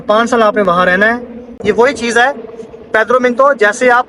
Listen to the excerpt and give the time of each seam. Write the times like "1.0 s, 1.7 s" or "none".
1.5 s